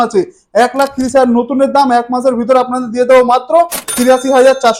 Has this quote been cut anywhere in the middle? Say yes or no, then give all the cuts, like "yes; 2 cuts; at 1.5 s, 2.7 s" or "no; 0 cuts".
no; 0 cuts